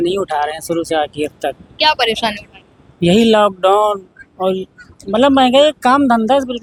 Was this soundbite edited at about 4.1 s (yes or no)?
no